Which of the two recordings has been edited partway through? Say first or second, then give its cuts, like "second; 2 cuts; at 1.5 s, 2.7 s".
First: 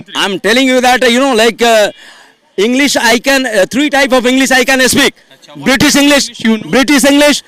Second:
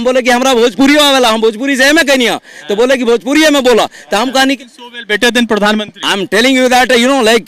second; 1 cut; at 4.3 s